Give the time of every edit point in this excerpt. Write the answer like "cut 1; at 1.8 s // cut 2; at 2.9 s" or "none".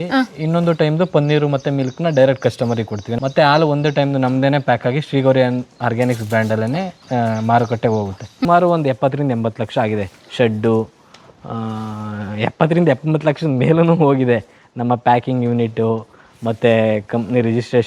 cut 1; at 3.1 s // cut 2; at 8.4 s